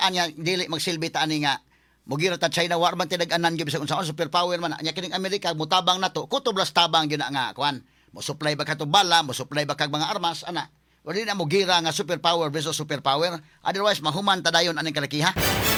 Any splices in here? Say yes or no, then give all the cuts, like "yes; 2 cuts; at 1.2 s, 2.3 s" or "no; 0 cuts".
no; 0 cuts